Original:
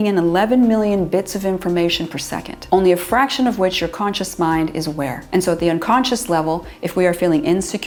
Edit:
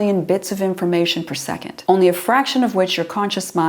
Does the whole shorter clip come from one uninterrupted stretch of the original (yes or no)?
yes